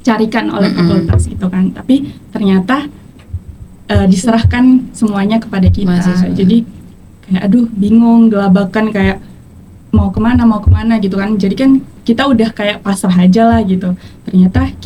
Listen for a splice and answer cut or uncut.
uncut